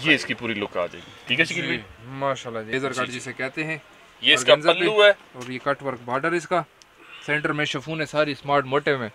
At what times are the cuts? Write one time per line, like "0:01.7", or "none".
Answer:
0:02.7